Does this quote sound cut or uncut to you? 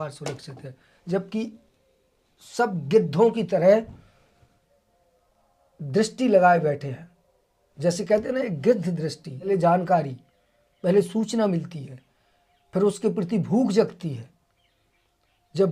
cut